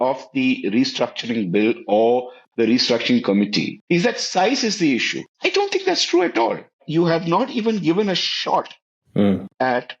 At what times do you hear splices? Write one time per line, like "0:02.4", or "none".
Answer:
0:03.8
0:05.2
0:06.8